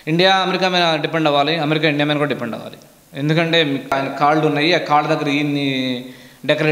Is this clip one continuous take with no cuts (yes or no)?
no